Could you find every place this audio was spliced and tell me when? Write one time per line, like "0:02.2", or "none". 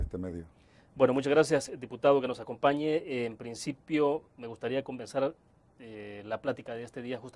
none